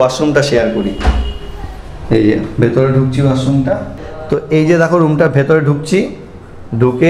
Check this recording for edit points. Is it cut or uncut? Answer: cut